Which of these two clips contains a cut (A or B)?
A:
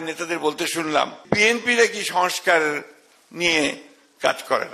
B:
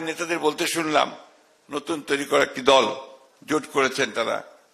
A